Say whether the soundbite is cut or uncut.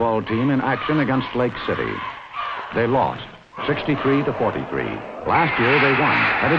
uncut